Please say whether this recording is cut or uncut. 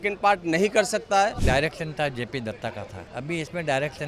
cut